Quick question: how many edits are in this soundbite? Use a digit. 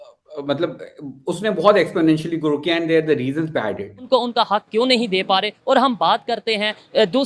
1